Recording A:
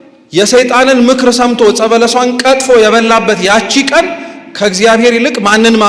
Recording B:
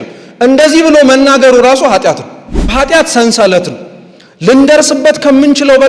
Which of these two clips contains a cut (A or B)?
B